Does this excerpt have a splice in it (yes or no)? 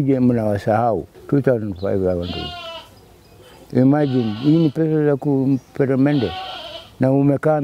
yes